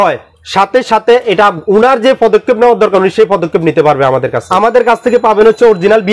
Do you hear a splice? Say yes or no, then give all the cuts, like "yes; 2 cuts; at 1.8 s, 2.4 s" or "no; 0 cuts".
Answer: yes; 1 cut; at 4.4 s